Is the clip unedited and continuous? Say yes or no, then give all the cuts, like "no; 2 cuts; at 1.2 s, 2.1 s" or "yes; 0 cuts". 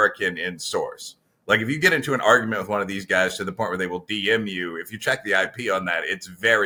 yes; 0 cuts